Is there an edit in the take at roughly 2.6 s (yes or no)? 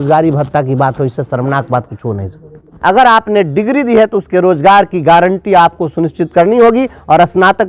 yes